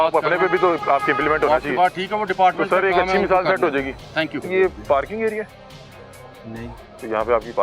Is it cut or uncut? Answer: cut